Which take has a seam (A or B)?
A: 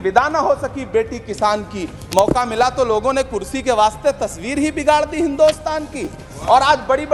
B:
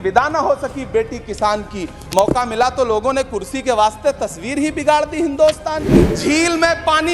B